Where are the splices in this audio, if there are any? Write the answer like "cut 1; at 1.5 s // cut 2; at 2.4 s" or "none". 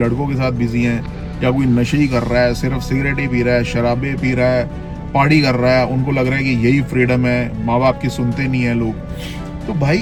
none

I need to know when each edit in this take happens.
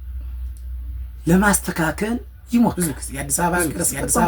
cut 1; at 2.7 s

